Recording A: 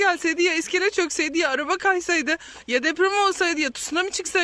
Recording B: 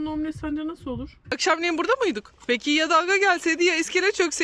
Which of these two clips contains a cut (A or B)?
B